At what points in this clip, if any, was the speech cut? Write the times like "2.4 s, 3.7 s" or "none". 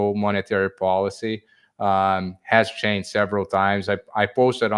none